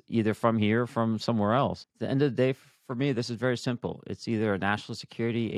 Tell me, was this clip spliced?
yes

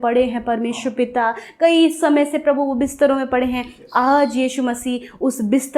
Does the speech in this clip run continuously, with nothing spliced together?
yes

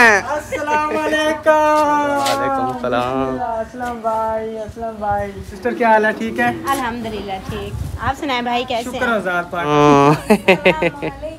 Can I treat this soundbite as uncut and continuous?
no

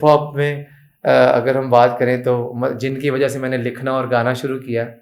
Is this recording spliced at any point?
no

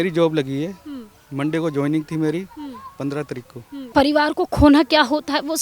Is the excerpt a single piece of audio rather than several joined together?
no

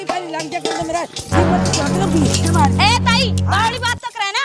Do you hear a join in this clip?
no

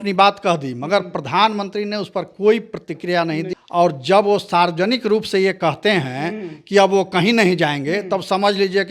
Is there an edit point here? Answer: yes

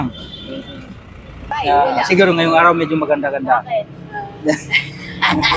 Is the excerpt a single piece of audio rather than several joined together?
no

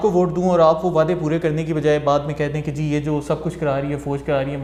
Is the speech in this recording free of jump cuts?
yes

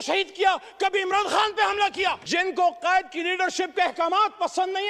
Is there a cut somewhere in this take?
yes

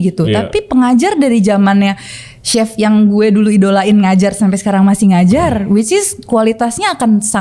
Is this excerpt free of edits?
yes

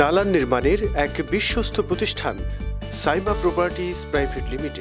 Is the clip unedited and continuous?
yes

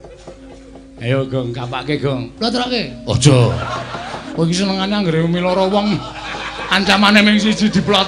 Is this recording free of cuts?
no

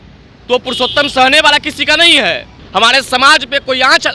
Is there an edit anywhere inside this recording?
yes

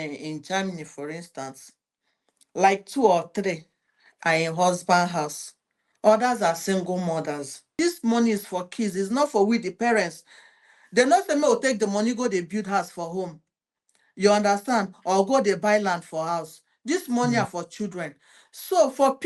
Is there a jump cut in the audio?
yes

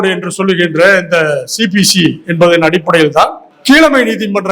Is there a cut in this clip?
yes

